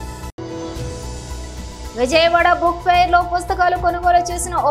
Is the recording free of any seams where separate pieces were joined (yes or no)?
no